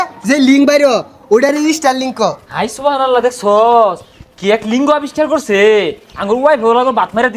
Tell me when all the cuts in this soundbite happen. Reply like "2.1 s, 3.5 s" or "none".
none